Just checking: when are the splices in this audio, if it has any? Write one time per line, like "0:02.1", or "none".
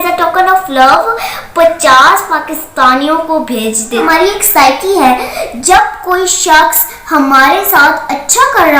0:04.0